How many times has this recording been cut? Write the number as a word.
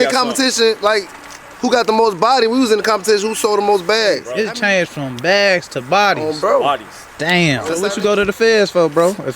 two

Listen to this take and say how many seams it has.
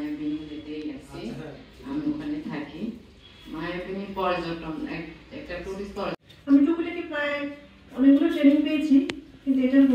zero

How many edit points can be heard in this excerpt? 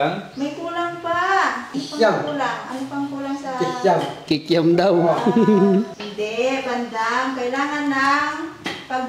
three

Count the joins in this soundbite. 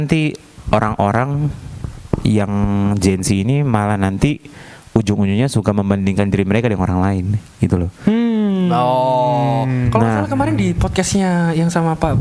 zero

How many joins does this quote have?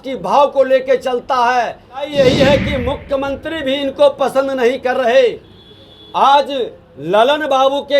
one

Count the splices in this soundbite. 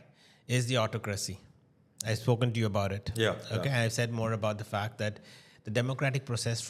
zero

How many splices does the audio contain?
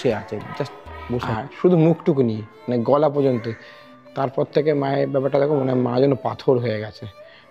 one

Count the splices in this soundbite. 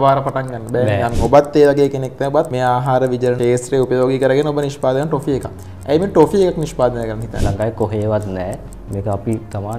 four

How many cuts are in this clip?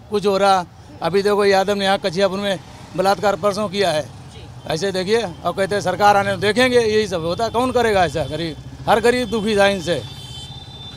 zero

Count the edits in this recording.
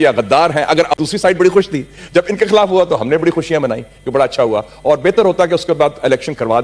one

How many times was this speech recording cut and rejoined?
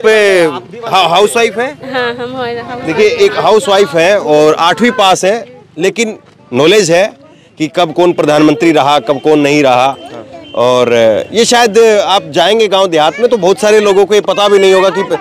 zero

